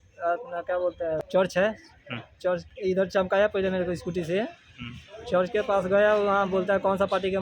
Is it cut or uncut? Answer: cut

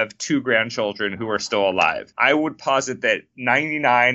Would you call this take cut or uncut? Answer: cut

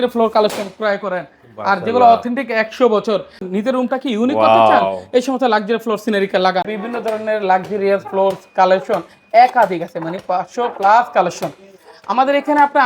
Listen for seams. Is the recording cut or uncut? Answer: cut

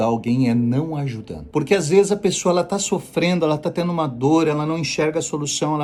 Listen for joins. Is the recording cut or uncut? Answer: uncut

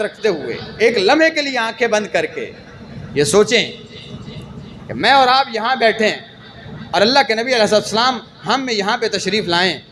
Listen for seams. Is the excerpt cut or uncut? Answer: uncut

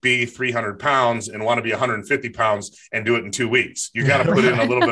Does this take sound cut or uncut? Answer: uncut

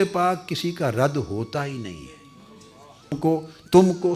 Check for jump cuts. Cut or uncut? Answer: cut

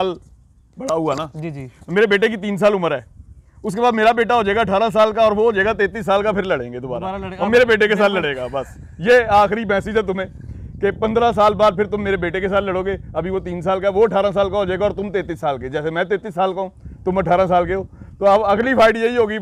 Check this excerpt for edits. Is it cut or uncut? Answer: uncut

